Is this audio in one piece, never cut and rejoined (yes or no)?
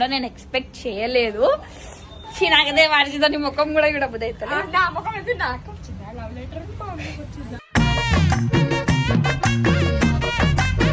yes